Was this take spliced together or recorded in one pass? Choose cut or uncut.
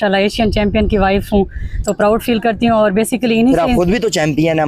uncut